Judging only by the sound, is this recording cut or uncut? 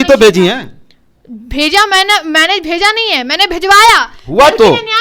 uncut